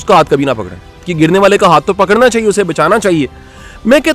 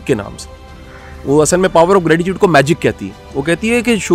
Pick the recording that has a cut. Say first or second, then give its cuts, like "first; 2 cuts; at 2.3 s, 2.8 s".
first; 1 cut; at 1.1 s